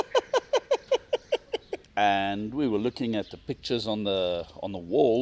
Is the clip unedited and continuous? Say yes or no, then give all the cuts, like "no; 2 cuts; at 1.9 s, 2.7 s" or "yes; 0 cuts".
no; 1 cut; at 1.8 s